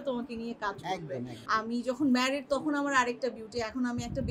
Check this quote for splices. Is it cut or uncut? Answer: cut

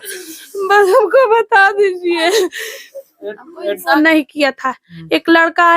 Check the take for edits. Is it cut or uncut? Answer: cut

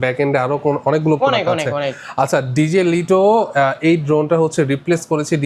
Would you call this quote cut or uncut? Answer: uncut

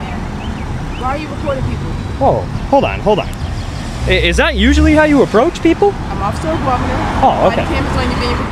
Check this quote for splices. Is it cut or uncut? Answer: uncut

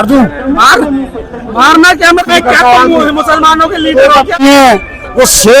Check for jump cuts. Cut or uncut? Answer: cut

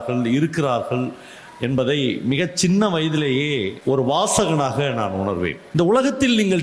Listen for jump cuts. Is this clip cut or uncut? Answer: cut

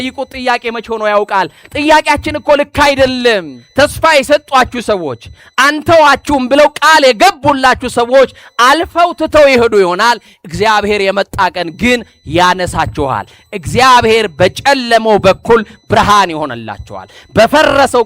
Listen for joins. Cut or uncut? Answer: cut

